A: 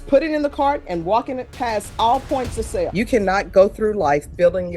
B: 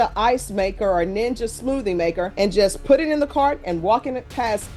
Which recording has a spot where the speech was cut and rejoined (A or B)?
A